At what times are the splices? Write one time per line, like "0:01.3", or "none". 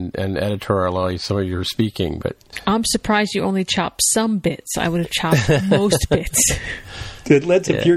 0:02.5